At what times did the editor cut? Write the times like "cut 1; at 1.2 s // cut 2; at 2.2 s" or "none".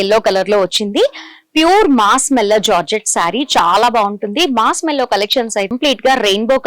cut 1; at 5.7 s